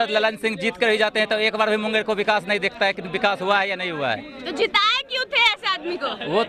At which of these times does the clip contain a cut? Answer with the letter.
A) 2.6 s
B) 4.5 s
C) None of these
C